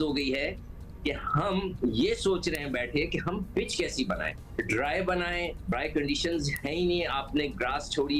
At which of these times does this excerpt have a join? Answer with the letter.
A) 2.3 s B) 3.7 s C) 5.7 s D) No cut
C